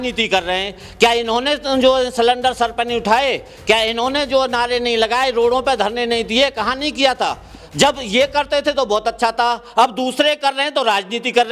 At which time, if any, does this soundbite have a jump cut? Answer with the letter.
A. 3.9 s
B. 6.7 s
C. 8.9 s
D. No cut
D